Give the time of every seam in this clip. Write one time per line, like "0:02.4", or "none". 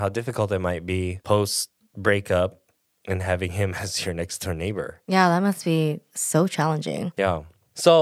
0:01.2
0:05.0
0:06.1
0:07.2